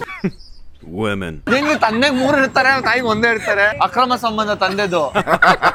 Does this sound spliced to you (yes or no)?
no